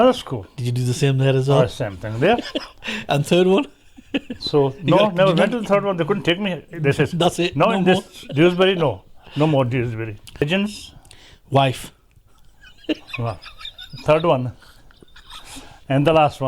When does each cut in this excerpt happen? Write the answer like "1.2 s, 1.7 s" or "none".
10.4 s